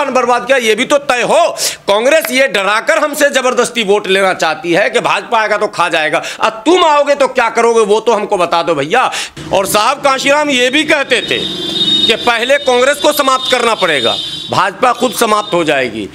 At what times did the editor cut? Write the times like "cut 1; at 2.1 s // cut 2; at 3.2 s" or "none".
cut 1; at 9.4 s